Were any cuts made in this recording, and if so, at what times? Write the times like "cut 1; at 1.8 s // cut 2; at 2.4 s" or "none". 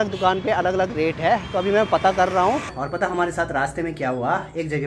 cut 1; at 2.8 s